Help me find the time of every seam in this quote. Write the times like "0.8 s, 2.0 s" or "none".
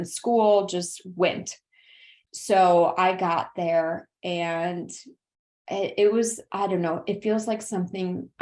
none

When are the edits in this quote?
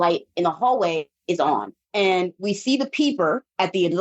1.5 s

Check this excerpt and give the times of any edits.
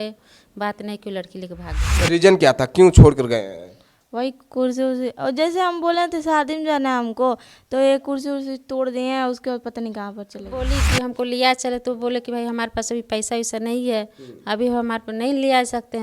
1.8 s, 10.6 s

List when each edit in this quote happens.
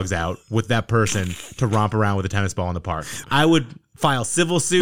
3.1 s

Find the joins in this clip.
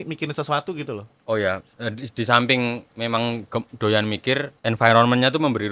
4.5 s

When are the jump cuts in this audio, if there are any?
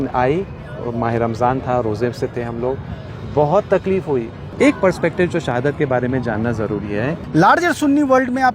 4.4 s, 7.2 s

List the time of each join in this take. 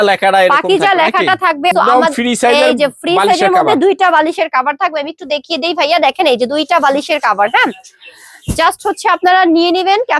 1.7 s

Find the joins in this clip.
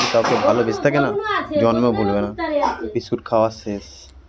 2.8 s

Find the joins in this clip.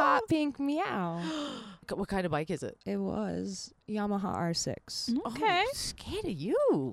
1.9 s, 3.8 s

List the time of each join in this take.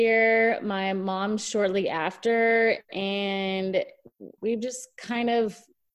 4.3 s

